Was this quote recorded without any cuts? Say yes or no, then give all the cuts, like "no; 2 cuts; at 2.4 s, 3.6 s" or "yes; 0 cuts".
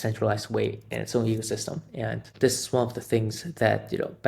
no; 1 cut; at 2.3 s